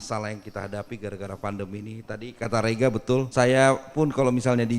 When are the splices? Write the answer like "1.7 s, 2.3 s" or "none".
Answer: 3.3 s